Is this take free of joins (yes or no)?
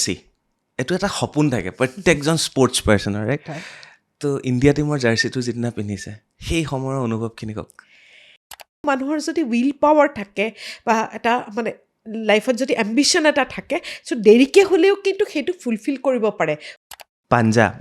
no